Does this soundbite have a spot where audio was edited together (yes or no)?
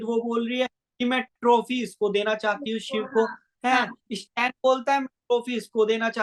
no